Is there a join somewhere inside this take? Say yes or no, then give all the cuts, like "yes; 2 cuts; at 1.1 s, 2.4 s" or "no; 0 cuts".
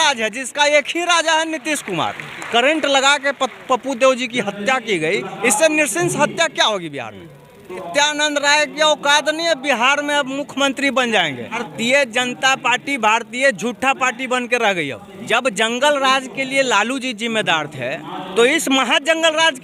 yes; 4 cuts; at 2.3 s, 7.9 s, 11.7 s, 15.1 s